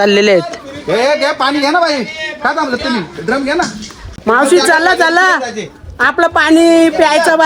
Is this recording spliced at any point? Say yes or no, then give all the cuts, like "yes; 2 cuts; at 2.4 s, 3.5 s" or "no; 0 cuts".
no; 0 cuts